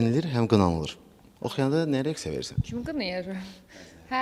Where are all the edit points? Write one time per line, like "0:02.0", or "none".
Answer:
none

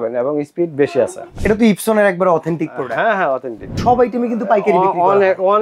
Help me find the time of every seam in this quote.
0:01.3
0:03.8

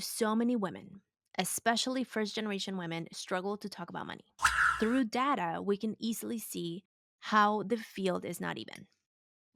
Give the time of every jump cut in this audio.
0:04.6

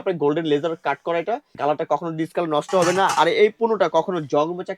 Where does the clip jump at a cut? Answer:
0:01.5

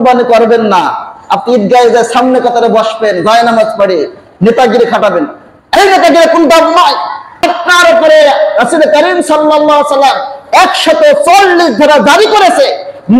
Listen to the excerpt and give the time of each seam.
0:07.2

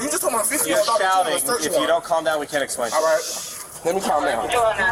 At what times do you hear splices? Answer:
none

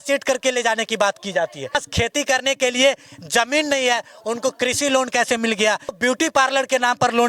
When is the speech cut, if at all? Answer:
0:01.8
0:06.0

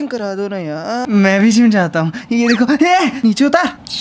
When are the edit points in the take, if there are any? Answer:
0:01.0

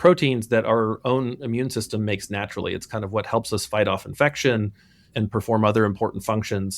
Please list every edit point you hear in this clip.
0:05.1

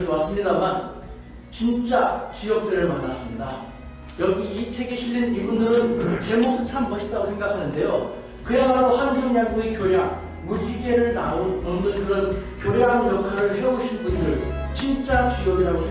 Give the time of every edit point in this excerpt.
none

